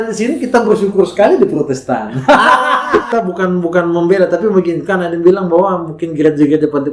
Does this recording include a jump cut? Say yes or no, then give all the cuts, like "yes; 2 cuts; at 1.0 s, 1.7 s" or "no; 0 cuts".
yes; 1 cut; at 3.1 s